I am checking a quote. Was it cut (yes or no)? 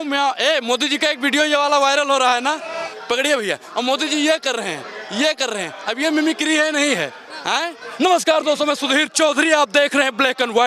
yes